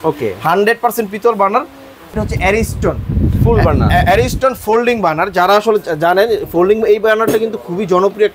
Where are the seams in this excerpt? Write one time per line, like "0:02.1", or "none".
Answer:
0:02.1